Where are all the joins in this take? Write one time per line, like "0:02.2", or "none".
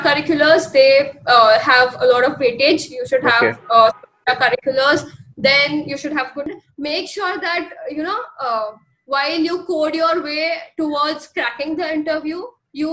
0:06.5